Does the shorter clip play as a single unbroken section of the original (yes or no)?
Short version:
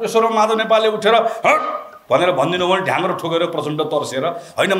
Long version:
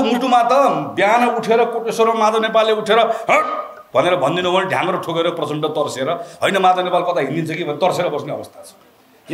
yes